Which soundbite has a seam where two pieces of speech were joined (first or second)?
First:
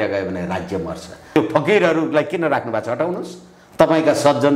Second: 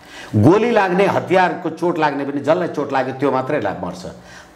first